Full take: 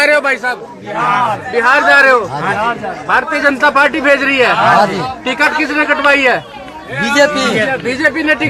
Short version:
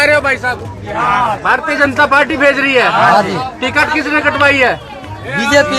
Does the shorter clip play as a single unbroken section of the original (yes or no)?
no